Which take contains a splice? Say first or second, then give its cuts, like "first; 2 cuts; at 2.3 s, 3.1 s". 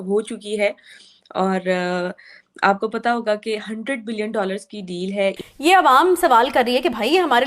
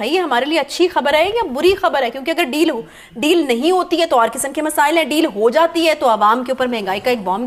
first; 1 cut; at 5.4 s